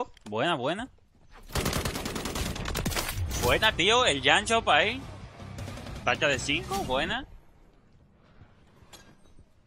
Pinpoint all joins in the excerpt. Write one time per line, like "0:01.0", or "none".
none